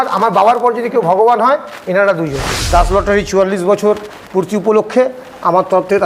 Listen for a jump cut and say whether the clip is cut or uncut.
cut